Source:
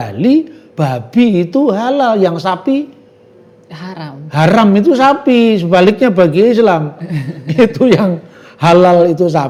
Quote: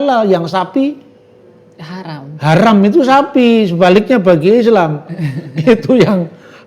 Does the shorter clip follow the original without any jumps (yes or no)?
yes